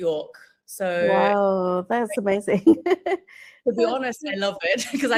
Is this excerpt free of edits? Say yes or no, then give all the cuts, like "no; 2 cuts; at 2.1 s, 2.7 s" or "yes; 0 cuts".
yes; 0 cuts